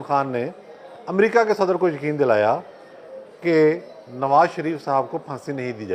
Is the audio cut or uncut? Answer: uncut